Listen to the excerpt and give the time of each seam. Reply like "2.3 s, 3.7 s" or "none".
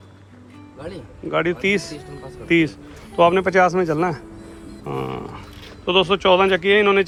none